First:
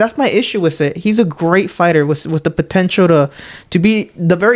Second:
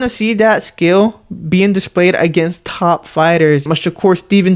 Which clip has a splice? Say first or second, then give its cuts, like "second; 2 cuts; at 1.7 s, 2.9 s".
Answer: second; 1 cut; at 3.7 s